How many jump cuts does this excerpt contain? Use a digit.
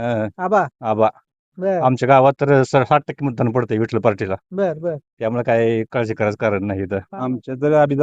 1